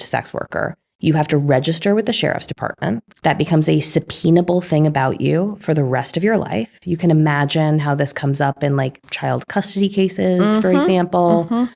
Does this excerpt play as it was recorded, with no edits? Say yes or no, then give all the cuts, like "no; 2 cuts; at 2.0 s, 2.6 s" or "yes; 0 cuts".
no; 1 cut; at 3.1 s